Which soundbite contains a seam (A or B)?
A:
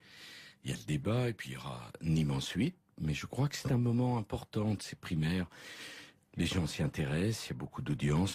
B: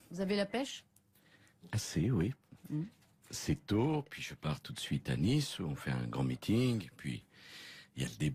A